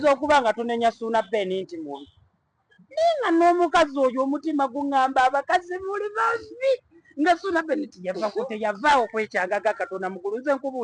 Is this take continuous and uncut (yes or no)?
yes